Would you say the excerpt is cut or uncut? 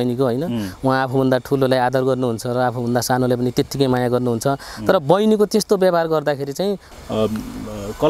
cut